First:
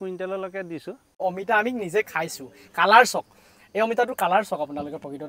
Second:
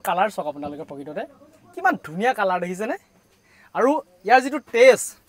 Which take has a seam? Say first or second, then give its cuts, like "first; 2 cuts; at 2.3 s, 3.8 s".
first; 1 cut; at 1.2 s